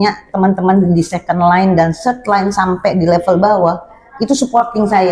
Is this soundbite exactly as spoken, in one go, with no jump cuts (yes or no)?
yes